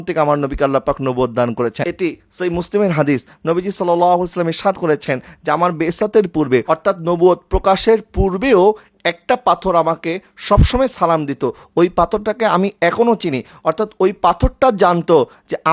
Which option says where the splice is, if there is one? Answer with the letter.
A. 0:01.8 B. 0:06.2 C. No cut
A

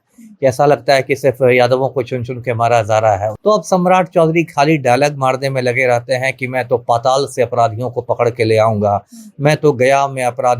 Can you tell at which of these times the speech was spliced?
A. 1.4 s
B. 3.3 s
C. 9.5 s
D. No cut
B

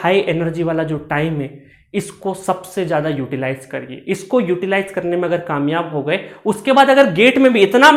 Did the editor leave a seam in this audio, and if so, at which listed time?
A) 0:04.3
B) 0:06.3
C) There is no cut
C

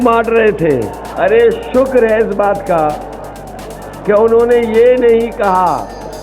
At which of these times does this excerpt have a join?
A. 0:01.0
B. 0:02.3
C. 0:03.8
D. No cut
A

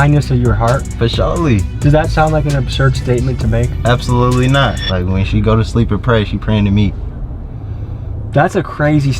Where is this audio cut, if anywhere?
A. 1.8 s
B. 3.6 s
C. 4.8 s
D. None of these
C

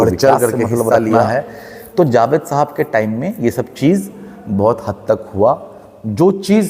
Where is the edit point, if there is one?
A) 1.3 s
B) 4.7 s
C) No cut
A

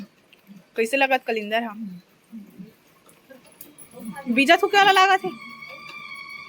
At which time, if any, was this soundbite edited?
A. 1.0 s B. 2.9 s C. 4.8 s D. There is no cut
D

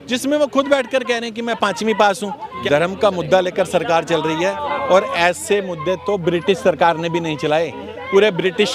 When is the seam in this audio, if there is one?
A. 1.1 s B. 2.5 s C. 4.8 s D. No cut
B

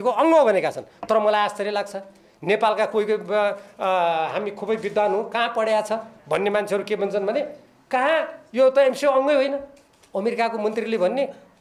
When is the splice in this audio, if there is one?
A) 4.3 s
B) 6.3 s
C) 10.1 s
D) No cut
D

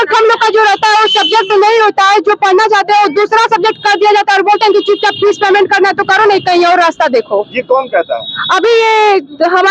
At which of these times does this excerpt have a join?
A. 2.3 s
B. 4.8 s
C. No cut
C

